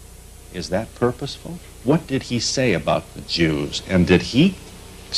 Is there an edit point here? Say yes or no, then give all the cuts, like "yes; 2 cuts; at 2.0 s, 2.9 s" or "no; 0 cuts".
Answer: yes; 1 cut; at 1.9 s